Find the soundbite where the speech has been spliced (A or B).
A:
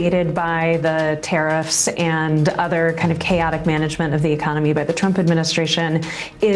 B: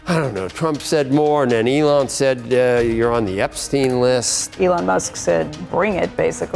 B